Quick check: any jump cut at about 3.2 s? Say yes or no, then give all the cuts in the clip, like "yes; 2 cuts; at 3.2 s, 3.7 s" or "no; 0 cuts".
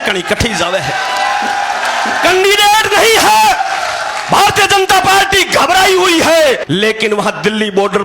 no; 1 cut; at 6.6 s